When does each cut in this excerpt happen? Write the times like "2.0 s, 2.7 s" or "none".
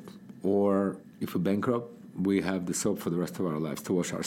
1.1 s